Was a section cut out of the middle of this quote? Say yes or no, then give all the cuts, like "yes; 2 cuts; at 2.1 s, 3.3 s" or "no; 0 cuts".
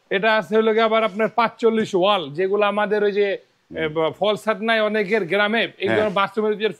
no; 0 cuts